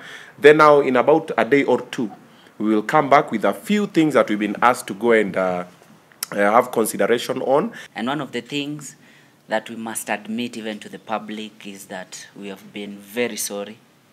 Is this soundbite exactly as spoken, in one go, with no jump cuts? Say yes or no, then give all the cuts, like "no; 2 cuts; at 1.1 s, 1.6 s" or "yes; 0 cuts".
no; 1 cut; at 7.8 s